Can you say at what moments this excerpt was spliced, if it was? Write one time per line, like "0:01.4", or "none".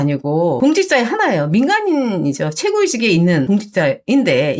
0:03.5